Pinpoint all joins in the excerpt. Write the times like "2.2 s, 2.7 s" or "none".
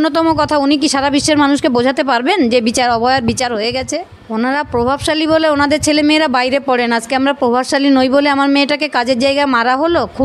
4.2 s